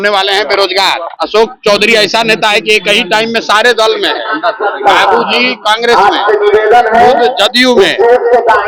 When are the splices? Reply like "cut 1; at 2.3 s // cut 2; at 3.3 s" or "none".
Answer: cut 1; at 1.1 s